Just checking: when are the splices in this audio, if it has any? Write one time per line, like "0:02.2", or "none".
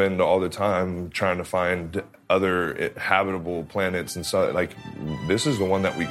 none